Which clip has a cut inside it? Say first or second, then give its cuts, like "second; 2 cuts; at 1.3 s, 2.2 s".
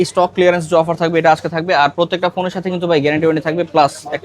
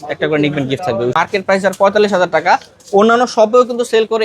second; 1 cut; at 1.1 s